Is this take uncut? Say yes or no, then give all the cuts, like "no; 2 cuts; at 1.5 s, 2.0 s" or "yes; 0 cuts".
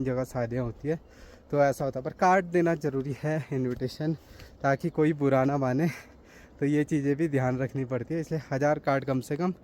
yes; 0 cuts